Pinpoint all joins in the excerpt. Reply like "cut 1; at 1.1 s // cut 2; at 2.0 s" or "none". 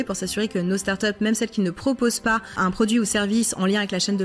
cut 1; at 2.5 s

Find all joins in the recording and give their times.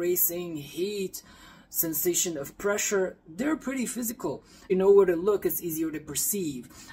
cut 1; at 4.2 s

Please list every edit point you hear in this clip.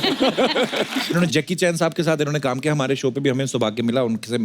cut 1; at 1.1 s

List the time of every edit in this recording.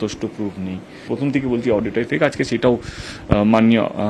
cut 1; at 1.0 s

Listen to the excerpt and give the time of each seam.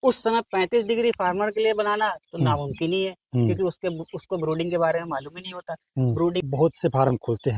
cut 1; at 6.4 s

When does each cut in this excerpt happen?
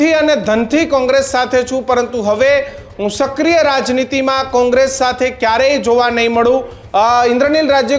cut 1; at 6.8 s

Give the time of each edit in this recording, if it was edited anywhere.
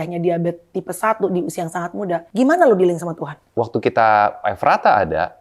cut 1; at 2.3 s // cut 2; at 3.4 s

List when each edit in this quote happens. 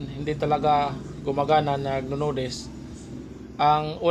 none

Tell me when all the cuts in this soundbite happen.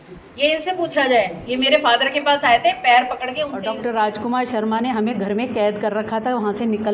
cut 1; at 3.6 s

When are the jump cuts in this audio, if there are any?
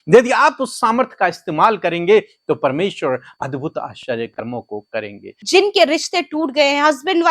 cut 1; at 5.3 s

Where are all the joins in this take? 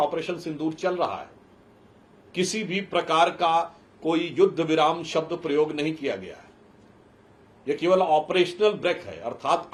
none

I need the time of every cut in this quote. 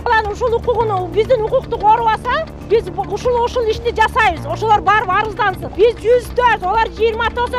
cut 1; at 2.5 s // cut 2; at 5.6 s

